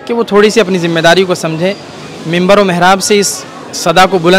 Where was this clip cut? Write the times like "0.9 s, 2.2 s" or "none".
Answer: none